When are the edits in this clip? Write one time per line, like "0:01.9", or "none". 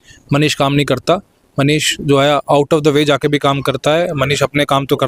none